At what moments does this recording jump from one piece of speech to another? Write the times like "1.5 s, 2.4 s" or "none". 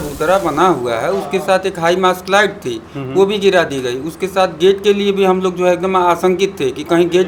none